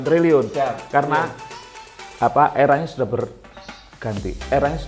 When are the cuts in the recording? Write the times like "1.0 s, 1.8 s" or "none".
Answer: none